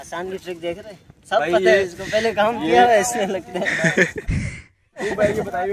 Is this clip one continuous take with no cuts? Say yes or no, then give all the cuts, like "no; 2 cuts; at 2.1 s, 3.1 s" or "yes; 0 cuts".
yes; 0 cuts